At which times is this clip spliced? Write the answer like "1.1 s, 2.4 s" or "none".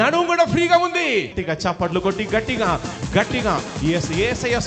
1.4 s